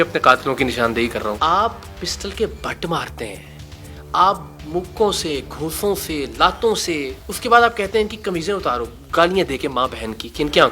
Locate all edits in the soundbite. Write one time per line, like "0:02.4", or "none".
0:01.4